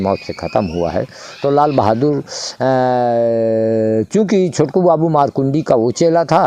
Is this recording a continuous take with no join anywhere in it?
yes; 0 cuts

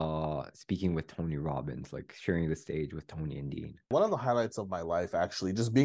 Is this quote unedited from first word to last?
no; 1 cut; at 3.9 s

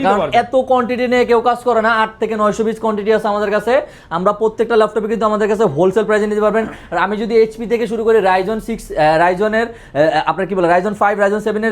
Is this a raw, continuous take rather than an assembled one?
yes; 0 cuts

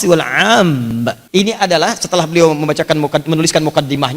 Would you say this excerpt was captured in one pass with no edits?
no; 1 cut; at 1.2 s

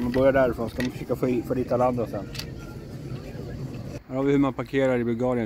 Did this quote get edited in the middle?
yes; 1 cut; at 4.0 s

